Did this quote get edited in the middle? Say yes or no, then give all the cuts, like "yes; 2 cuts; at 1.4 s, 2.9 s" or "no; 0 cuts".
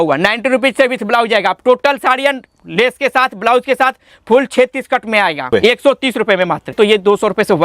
yes; 2 cuts; at 5.5 s, 6.7 s